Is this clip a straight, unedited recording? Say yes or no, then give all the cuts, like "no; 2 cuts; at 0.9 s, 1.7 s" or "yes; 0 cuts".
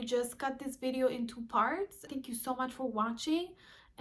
no; 1 cut; at 2.1 s